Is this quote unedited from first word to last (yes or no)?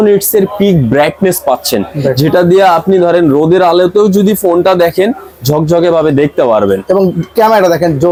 yes